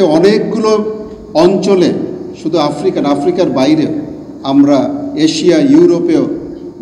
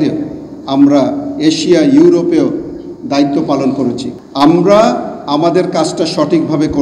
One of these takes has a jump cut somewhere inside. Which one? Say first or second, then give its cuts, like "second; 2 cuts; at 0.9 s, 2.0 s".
second; 1 cut; at 4.1 s